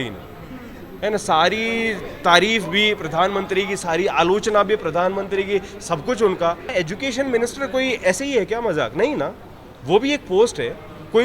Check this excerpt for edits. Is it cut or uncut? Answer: cut